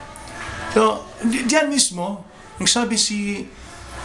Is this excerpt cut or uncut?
uncut